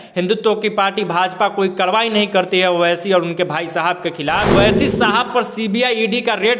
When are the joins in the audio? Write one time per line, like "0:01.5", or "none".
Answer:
0:04.5

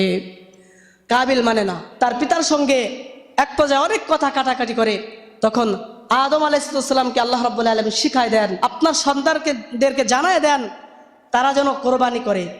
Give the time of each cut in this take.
0:01.8
0:08.5

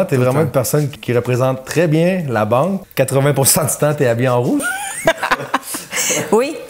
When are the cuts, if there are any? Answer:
0:00.9
0:02.8

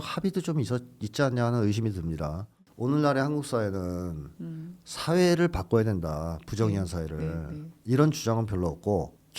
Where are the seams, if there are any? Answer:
0:02.6

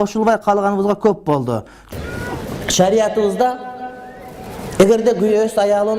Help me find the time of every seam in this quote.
0:01.8

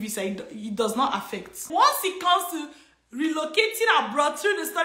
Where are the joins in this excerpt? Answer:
0:01.6

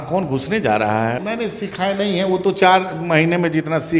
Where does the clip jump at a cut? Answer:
0:01.2

